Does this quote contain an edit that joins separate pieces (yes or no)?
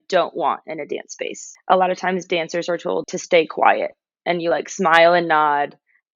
yes